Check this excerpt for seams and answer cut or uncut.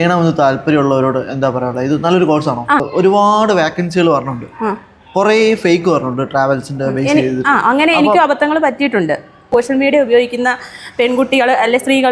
cut